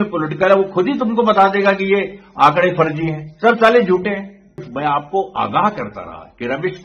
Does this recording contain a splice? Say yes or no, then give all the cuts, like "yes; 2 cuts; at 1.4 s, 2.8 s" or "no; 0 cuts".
yes; 1 cut; at 4.7 s